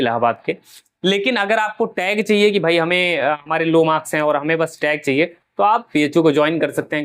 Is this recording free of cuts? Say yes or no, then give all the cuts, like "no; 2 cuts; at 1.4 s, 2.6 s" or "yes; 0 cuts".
yes; 0 cuts